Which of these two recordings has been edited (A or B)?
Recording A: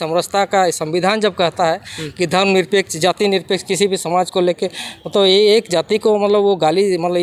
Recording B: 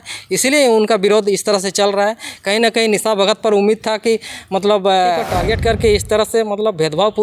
B